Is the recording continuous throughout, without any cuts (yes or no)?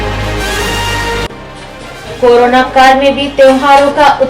no